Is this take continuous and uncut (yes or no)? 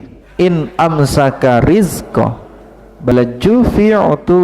no